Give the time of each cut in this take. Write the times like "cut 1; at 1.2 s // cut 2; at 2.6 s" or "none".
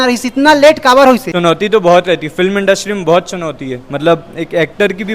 cut 1; at 1.3 s